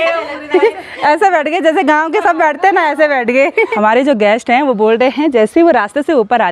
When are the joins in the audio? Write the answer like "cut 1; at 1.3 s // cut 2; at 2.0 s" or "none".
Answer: cut 1; at 3.7 s